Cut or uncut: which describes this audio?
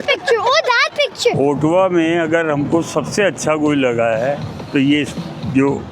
cut